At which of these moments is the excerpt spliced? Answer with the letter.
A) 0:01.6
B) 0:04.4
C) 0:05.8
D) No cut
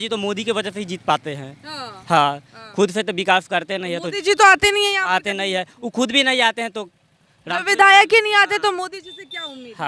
D